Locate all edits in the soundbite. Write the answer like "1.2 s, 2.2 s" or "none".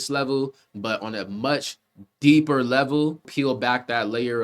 3.3 s